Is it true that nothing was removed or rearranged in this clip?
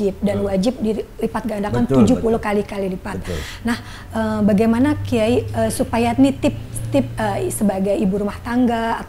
yes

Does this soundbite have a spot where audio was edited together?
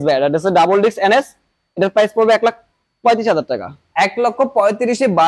no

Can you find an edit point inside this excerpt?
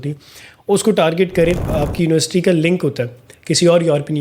yes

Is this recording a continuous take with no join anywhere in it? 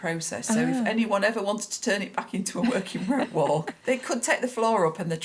no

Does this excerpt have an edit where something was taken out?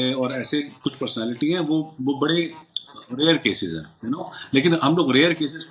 no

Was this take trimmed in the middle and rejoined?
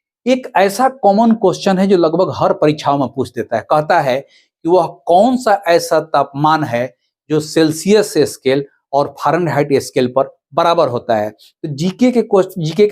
no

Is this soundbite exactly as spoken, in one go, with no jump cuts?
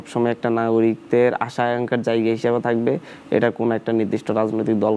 yes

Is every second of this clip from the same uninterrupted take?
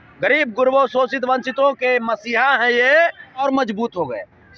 no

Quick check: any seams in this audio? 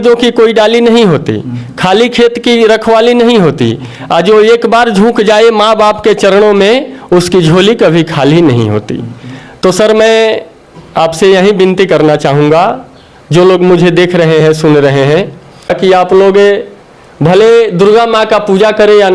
no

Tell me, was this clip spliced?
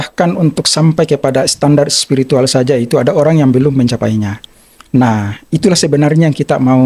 no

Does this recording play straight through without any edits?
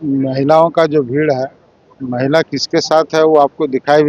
yes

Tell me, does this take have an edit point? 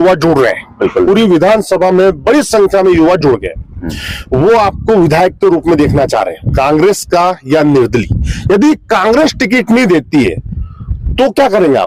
no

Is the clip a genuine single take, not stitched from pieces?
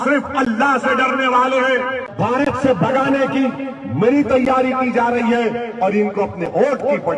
no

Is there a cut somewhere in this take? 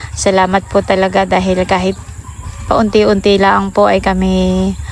no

